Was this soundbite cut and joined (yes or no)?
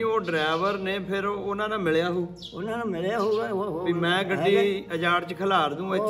no